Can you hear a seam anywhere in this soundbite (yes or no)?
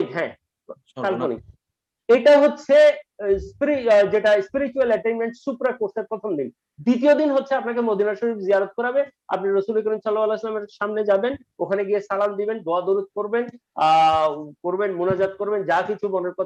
no